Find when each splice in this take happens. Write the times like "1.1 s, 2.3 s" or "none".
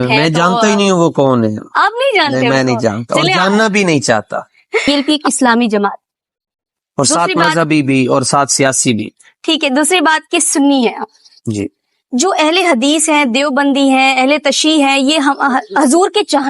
4.9 s